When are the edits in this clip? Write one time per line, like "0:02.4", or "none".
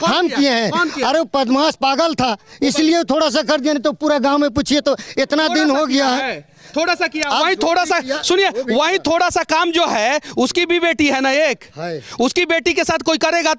none